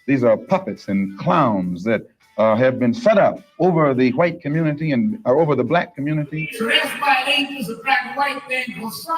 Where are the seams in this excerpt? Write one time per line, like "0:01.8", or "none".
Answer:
0:06.4